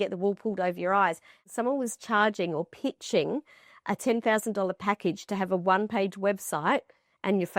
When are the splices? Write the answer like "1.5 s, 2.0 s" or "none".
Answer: 1.5 s